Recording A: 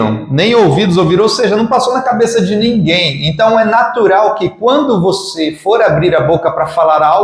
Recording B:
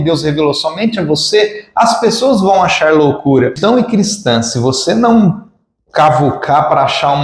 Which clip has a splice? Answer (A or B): B